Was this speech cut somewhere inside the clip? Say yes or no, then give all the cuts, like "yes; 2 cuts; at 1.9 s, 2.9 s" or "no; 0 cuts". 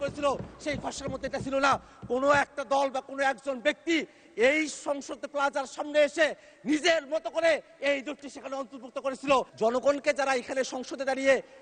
yes; 1 cut; at 9.5 s